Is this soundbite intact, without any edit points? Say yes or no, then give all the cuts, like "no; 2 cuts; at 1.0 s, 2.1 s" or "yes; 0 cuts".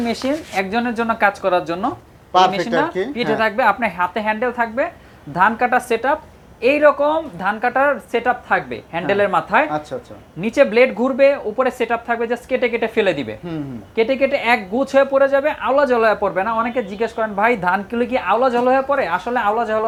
yes; 0 cuts